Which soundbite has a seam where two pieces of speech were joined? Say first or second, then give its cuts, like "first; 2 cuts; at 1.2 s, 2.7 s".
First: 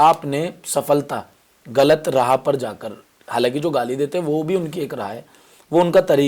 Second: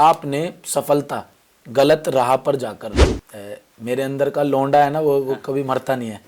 second; 1 cut; at 3.1 s